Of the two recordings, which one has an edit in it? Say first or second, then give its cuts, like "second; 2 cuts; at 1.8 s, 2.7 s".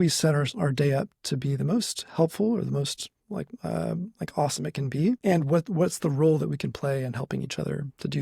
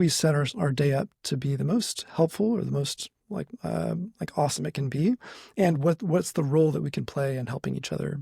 first; 1 cut; at 5.2 s